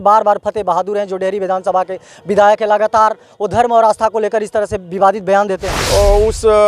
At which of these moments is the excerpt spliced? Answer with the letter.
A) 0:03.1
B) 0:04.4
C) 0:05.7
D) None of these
C